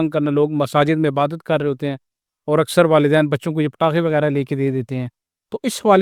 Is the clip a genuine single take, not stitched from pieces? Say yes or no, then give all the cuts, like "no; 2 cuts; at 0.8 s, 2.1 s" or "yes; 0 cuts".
yes; 0 cuts